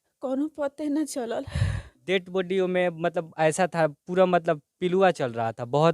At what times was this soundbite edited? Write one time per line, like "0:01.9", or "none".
0:01.9